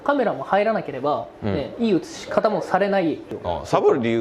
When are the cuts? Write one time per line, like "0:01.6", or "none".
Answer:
0:03.3